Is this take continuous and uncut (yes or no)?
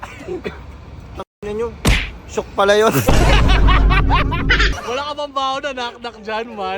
no